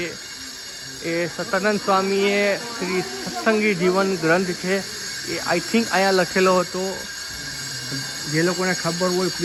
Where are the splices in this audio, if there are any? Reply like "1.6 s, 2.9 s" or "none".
none